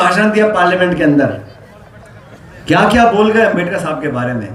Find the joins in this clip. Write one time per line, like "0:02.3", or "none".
none